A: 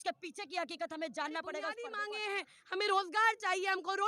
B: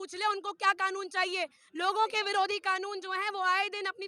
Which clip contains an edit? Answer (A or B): A